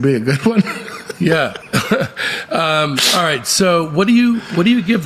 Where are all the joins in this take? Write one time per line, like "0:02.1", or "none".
none

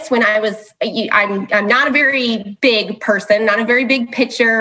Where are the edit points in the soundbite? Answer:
none

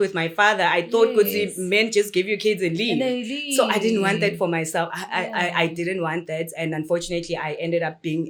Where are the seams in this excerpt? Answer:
none

